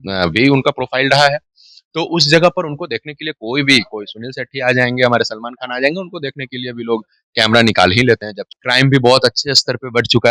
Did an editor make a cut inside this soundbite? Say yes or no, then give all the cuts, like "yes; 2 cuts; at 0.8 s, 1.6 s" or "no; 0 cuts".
yes; 1 cut; at 8.5 s